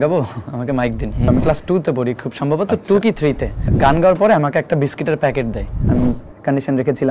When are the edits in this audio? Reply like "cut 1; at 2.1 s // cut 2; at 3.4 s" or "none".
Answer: cut 1; at 1.2 s // cut 2; at 3.7 s // cut 3; at 5.8 s